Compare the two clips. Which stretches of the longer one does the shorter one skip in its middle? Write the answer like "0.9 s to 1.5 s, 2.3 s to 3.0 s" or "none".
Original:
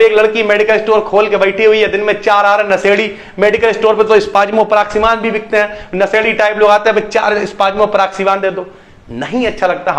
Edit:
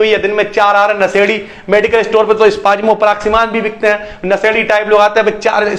none